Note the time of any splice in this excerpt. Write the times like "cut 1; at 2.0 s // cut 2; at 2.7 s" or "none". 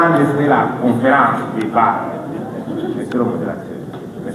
none